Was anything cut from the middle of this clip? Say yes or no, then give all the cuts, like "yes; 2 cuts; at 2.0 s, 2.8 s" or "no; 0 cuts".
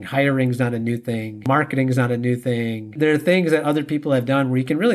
no; 0 cuts